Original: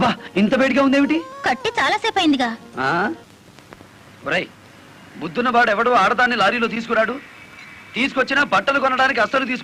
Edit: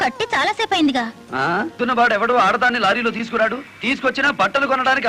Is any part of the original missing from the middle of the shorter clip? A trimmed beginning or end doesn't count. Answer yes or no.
yes